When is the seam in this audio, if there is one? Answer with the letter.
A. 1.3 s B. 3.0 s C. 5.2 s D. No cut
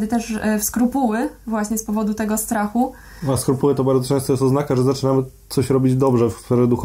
D